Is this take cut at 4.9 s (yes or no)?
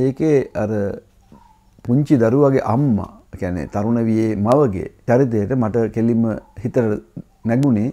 no